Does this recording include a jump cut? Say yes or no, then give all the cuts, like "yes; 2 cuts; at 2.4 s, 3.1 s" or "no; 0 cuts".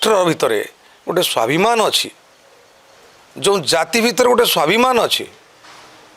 no; 0 cuts